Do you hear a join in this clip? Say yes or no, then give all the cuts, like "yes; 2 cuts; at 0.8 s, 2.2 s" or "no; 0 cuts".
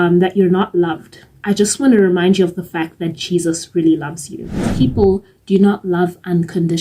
yes; 1 cut; at 4.7 s